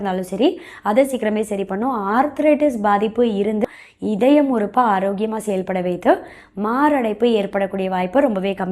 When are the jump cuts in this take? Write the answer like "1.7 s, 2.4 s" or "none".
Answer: 3.6 s